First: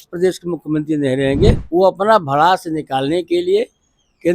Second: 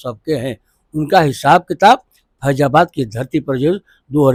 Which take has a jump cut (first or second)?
first